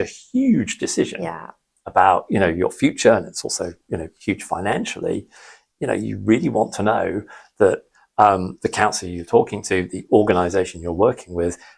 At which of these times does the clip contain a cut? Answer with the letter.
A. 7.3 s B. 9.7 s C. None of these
C